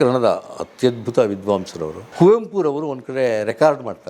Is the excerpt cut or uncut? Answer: cut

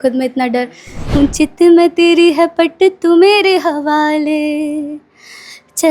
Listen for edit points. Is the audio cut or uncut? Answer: cut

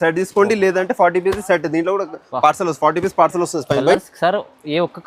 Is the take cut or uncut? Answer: uncut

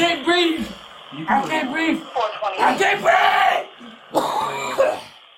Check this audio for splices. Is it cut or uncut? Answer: uncut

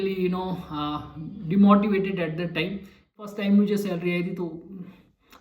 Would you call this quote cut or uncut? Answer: cut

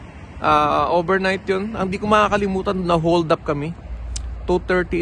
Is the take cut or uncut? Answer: uncut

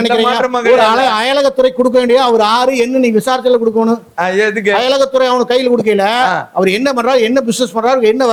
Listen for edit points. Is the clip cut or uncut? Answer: uncut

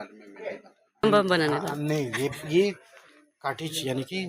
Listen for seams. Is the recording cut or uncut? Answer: cut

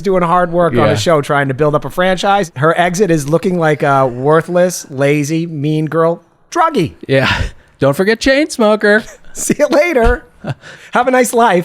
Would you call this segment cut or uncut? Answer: cut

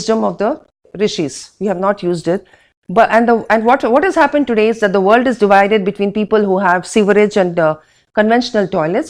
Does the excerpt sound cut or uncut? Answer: uncut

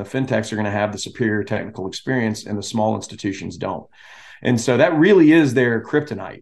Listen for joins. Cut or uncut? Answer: uncut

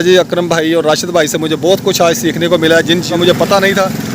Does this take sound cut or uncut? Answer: cut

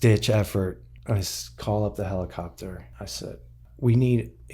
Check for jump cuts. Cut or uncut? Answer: cut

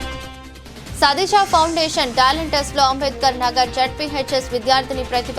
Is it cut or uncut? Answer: cut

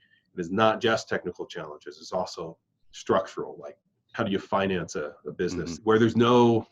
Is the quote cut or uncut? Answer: cut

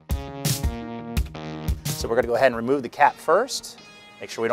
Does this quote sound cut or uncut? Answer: cut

